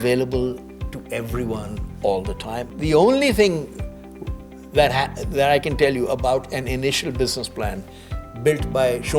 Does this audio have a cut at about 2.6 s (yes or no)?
yes